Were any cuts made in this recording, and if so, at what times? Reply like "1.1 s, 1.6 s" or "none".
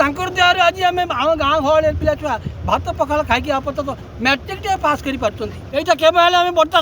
5.5 s